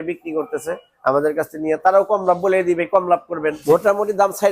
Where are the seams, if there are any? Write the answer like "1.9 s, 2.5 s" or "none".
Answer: 3.6 s